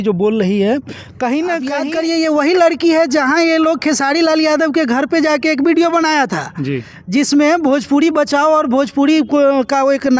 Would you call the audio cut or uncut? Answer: cut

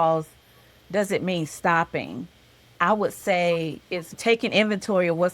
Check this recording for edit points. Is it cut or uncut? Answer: cut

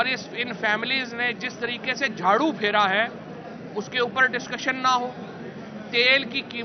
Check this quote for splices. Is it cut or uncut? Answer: uncut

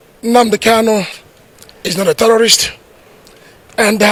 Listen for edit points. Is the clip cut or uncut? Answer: uncut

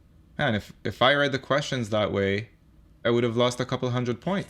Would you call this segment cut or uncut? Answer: cut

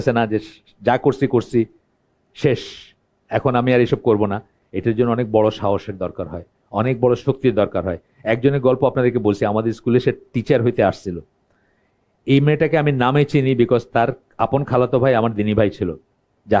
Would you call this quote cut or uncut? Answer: uncut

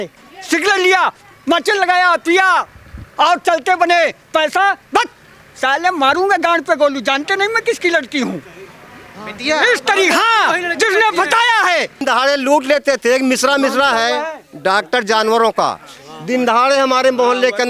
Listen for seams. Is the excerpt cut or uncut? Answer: cut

